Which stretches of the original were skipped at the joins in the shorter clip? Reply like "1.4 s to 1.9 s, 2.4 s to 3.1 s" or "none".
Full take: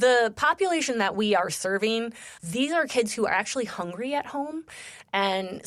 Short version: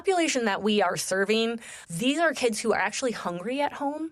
none

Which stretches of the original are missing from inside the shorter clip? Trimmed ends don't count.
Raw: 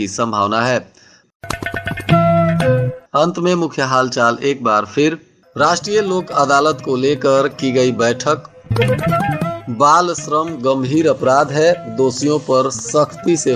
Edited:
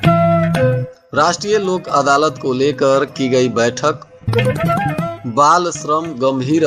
3.0 s to 5.3 s

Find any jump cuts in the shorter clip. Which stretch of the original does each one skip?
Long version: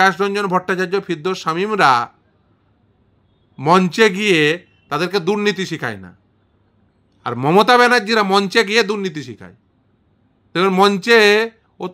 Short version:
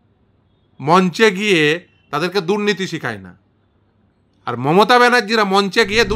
none

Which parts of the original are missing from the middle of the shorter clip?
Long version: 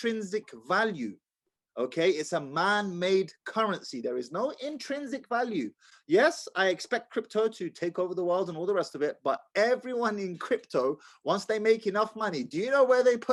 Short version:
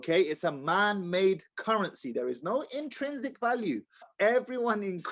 6.0 s to 9.4 s

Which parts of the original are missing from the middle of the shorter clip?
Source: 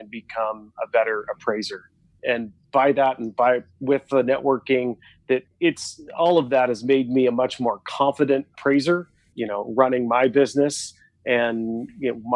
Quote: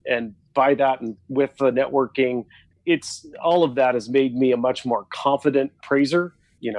3.3 s to 3.6 s, 5.2 s to 5.4 s

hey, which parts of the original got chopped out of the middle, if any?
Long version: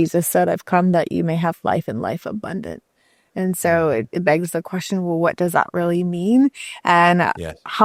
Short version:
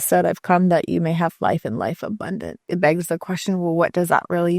2.9 s to 4.1 s

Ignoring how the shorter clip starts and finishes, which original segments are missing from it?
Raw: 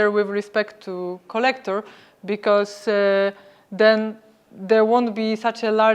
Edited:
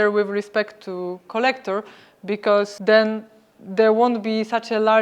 2.7 s to 3.7 s

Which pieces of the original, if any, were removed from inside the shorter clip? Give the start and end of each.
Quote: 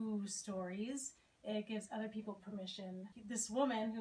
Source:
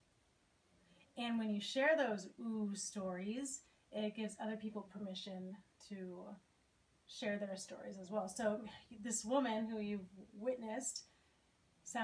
5.6 s to 8.9 s

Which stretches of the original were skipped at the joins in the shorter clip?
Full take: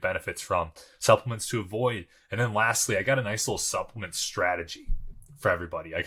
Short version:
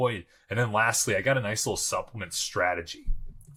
none

